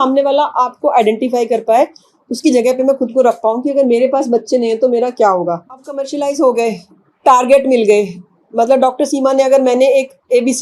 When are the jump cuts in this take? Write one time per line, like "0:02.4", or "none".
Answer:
0:06.0